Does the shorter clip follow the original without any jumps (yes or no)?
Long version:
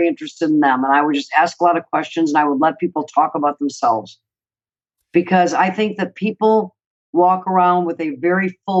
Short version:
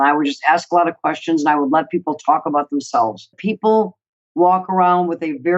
no